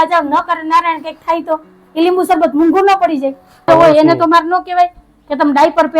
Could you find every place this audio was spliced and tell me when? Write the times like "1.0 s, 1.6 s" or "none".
3.7 s